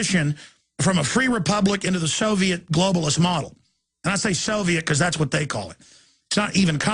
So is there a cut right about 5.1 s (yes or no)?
yes